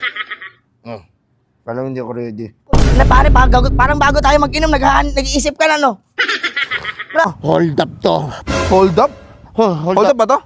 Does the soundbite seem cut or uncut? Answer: cut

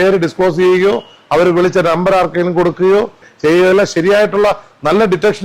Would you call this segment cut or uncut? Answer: cut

